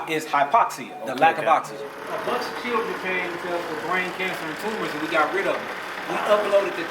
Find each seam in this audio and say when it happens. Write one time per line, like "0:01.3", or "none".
0:02.0